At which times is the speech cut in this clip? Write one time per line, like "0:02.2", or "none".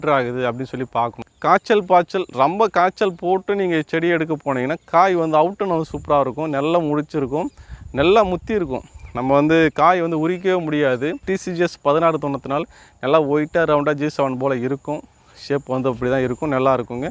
0:01.2
0:11.2